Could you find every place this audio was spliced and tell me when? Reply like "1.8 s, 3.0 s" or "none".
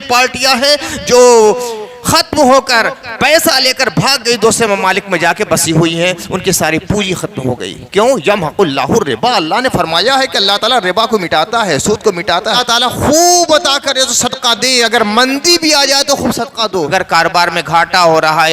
12.6 s, 16.9 s